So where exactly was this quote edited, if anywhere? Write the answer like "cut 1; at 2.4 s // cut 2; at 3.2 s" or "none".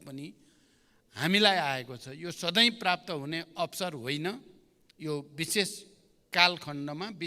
none